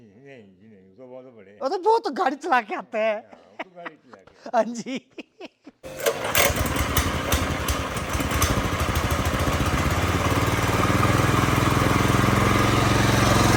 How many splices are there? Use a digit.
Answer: 0